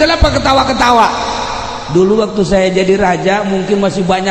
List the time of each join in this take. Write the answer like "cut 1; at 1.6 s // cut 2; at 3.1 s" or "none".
none